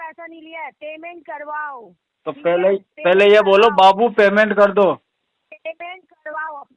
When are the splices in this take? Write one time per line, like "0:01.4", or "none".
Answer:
none